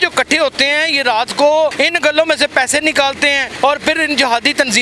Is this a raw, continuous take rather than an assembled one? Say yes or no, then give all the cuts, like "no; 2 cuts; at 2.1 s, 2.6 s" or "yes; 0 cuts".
no; 2 cuts; at 1.7 s, 3.5 s